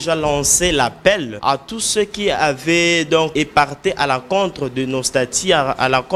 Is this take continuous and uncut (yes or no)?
no